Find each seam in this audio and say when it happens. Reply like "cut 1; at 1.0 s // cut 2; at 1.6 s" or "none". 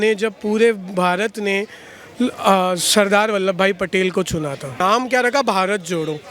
cut 1; at 4.8 s

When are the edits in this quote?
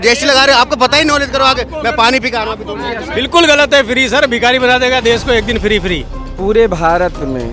cut 1; at 3.0 s // cut 2; at 6.3 s

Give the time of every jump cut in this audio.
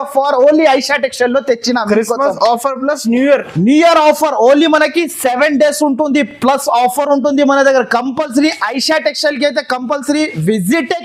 none

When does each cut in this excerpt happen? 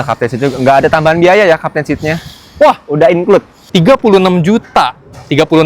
cut 1; at 3.6 s

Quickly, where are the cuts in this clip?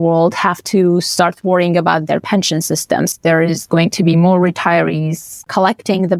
cut 1; at 3.1 s // cut 2; at 5.4 s

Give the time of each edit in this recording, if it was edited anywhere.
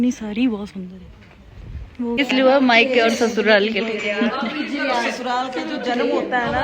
cut 1; at 2.2 s

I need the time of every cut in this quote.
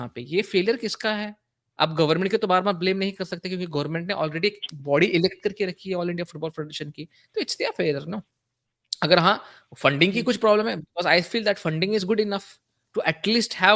none

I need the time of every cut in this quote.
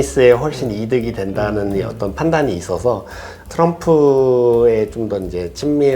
cut 1; at 3.3 s

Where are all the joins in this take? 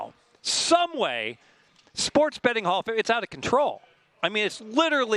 none

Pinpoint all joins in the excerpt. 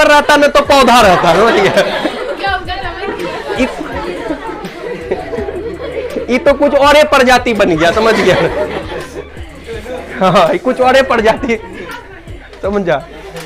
none

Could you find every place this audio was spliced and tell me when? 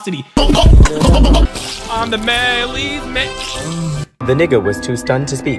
cut 1; at 1.6 s // cut 2; at 4.2 s

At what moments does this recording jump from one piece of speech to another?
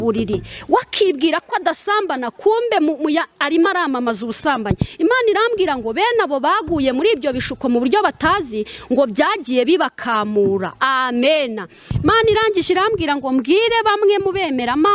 cut 1; at 11.8 s

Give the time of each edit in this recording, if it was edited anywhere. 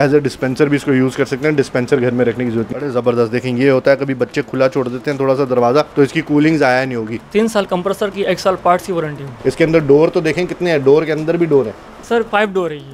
cut 1; at 2.7 s // cut 2; at 5.9 s // cut 3; at 7.2 s // cut 4; at 9.2 s // cut 5; at 12.0 s

